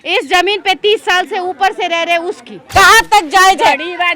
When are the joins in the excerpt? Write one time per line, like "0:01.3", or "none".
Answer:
0:02.6

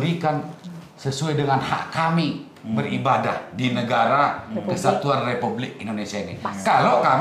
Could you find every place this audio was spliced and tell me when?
none

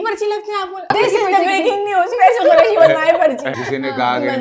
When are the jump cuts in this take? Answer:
0:00.9
0:03.5

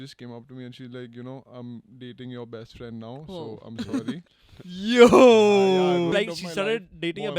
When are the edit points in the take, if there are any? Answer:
0:06.1

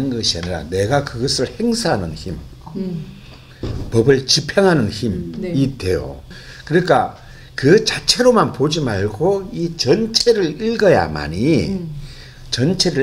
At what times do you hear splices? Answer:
0:06.3

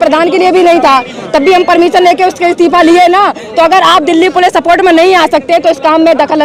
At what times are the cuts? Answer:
none

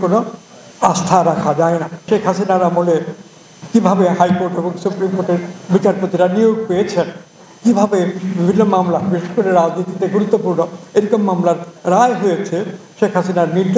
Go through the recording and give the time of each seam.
0:02.0
0:08.3

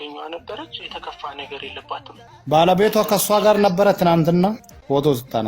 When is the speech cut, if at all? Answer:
0:02.2

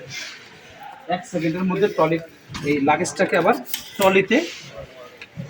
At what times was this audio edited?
none

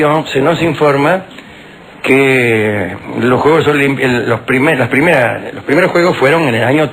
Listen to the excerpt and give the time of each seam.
none

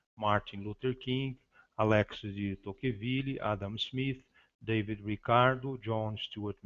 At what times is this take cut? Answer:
0:03.8

